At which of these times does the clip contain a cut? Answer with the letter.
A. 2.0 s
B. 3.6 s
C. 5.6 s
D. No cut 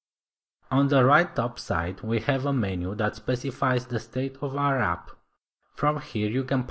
A